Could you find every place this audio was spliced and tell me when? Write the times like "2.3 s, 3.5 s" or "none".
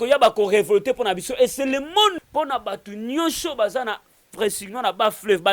2.2 s